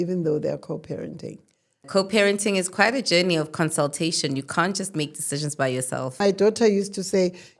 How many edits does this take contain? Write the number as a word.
two